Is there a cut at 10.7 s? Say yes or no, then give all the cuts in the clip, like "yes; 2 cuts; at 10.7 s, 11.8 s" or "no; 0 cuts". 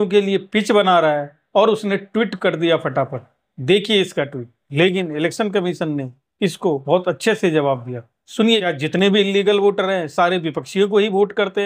no; 1 cut; at 8.6 s